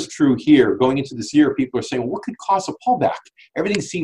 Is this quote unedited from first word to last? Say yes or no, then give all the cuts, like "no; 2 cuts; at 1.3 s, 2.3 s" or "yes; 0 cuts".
yes; 0 cuts